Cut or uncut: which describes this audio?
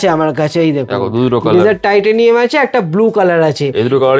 uncut